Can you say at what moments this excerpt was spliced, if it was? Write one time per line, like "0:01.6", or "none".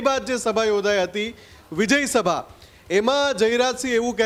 none